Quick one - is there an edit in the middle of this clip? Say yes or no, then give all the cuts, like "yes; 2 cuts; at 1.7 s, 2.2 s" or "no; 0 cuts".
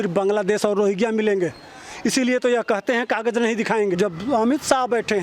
yes; 1 cut; at 4.0 s